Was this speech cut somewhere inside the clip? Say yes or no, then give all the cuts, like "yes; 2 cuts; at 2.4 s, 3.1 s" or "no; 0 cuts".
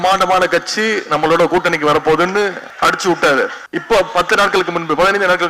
yes; 2 cuts; at 2.6 s, 3.6 s